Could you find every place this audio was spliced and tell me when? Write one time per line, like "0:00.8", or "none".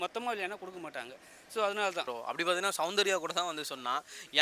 0:02.1